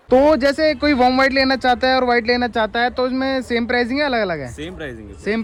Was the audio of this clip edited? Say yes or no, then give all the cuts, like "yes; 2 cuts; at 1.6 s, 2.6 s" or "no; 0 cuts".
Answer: no; 0 cuts